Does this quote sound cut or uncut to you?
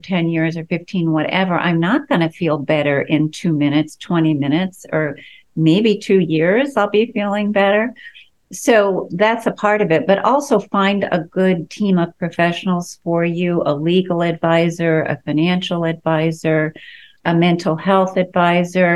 uncut